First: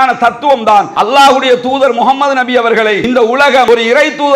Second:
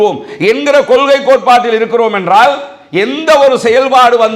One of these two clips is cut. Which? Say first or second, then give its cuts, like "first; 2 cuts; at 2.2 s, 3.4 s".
first; 2 cuts; at 0.9 s, 3.4 s